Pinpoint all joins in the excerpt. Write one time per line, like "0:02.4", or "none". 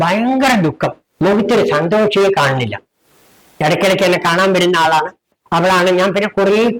0:05.3